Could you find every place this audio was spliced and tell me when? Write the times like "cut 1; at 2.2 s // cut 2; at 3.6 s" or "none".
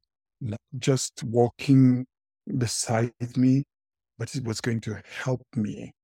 none